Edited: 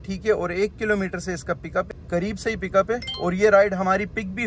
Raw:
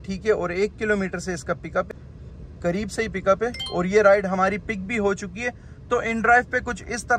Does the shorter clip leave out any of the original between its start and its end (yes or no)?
yes